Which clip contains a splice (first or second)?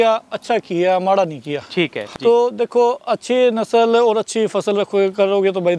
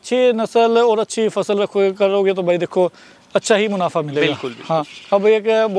first